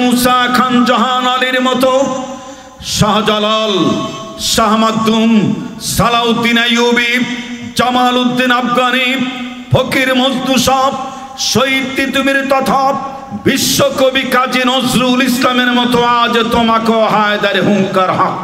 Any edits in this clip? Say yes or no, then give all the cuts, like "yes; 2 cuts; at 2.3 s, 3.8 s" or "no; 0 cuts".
no; 0 cuts